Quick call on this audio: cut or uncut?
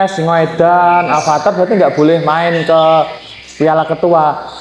uncut